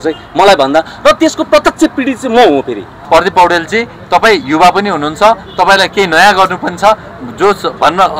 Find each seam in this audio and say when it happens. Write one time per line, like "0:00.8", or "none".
0:03.0